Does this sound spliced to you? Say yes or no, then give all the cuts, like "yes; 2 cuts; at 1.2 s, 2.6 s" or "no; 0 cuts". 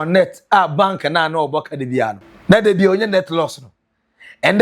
yes; 1 cut; at 2.3 s